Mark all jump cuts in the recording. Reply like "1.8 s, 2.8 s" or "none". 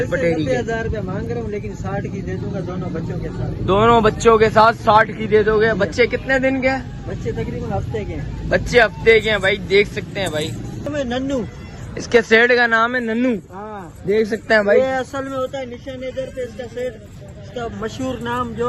10.9 s